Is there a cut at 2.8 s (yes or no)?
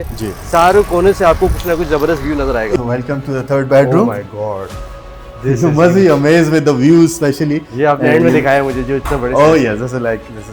yes